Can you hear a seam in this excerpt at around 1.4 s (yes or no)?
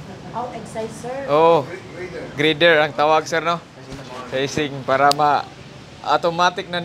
no